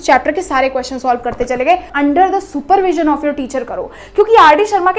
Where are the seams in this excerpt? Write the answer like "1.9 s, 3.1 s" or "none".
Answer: 1.9 s